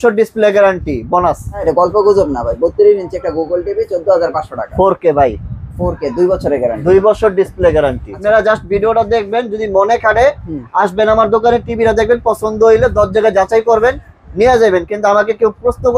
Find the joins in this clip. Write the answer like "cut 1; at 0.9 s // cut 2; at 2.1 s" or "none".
cut 1; at 1.6 s // cut 2; at 8.1 s